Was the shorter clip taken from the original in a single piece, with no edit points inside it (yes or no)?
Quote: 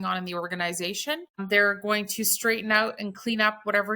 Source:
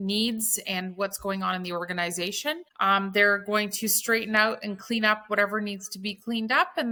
no